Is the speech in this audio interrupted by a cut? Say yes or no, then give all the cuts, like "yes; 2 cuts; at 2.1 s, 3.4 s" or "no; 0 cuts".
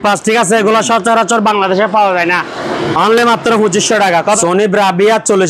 yes; 1 cut; at 4.4 s